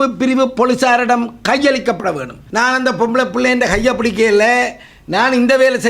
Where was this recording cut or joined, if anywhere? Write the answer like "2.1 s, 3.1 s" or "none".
2.3 s